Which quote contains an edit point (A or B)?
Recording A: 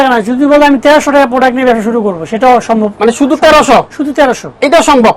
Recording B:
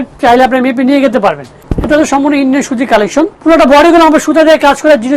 B